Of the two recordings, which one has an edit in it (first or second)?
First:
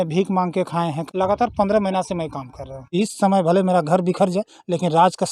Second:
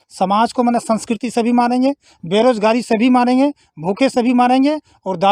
first